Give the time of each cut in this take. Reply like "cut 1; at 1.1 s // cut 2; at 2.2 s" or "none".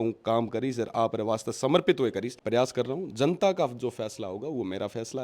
cut 1; at 2.3 s